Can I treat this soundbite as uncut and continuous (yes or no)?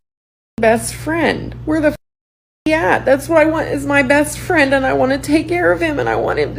yes